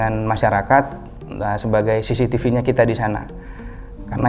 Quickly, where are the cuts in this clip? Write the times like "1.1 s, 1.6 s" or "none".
none